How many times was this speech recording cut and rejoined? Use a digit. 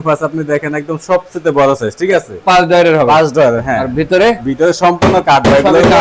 0